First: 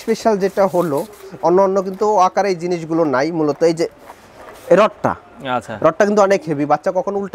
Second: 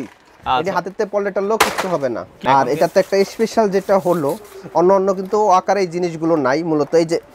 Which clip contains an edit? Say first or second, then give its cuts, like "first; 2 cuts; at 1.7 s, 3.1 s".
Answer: second; 1 cut; at 2.4 s